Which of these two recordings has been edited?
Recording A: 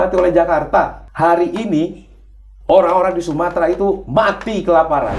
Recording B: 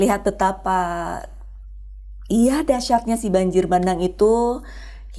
A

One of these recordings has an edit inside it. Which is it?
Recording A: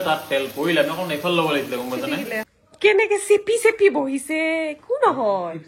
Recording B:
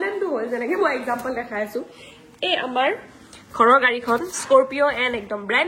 A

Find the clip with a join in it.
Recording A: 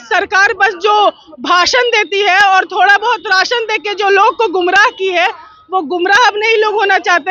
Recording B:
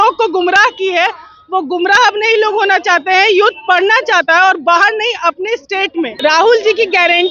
B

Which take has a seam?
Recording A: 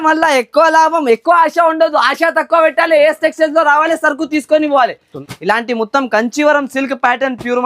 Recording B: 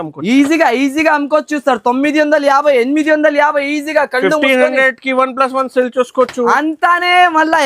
A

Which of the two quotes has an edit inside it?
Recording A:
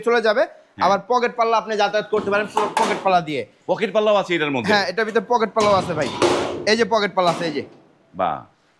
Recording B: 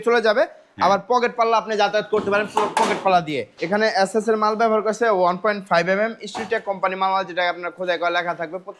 B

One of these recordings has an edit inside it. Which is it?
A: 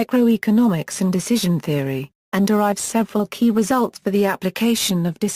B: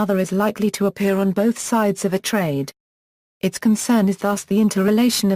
A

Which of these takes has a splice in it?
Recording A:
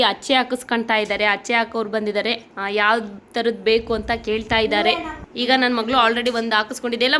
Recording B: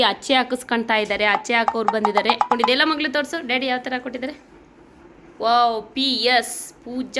B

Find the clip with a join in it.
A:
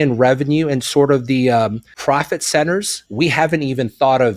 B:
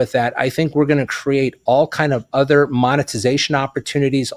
A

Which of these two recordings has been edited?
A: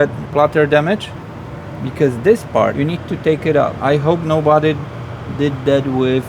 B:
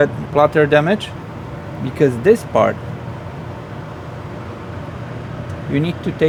A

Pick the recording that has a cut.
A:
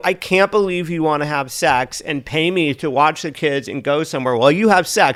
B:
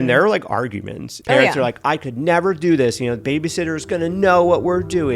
B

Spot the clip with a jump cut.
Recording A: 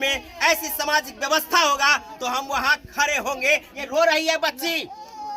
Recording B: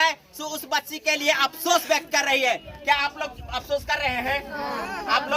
A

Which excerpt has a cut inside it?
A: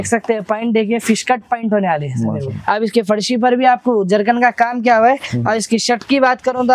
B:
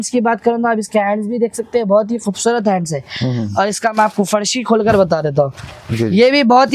A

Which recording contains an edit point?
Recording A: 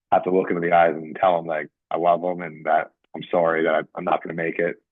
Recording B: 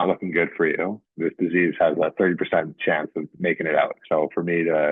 B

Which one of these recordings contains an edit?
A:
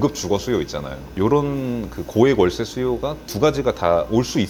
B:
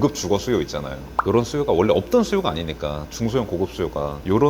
A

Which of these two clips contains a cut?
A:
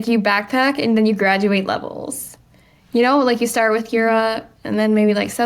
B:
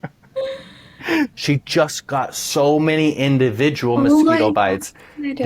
B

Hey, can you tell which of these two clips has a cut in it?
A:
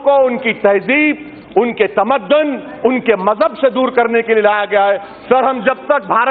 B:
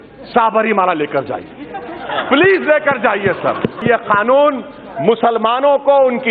B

